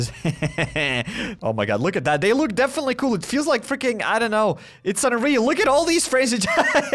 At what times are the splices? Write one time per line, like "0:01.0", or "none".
0:01.3